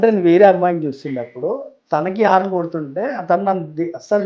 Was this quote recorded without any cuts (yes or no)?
yes